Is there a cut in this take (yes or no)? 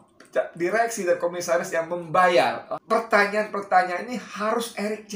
yes